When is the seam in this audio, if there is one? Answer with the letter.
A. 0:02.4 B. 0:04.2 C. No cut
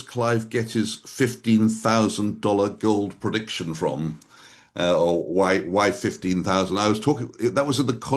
C